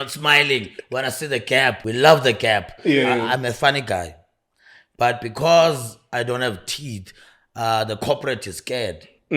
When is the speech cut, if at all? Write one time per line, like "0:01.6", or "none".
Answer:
0:01.8
0:02.9